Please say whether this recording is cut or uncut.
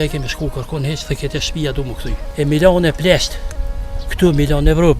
cut